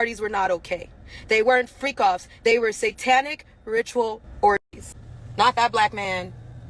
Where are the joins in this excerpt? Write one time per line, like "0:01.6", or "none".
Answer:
0:05.1